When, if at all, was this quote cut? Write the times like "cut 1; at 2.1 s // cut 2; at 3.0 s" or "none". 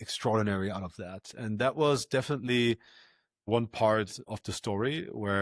cut 1; at 3.5 s // cut 2; at 4.3 s